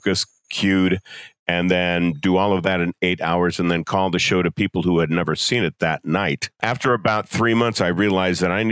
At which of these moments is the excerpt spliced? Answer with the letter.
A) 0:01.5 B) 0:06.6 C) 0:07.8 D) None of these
B